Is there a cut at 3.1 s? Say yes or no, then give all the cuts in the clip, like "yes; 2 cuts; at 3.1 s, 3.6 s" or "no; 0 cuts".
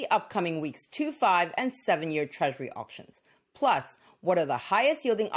yes; 1 cut; at 3.1 s